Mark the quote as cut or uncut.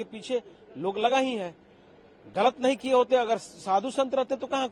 uncut